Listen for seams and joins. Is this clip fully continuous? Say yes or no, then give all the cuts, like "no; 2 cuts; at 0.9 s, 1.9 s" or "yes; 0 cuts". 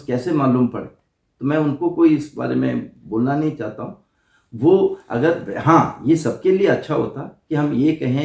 yes; 0 cuts